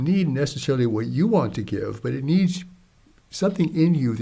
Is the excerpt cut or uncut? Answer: uncut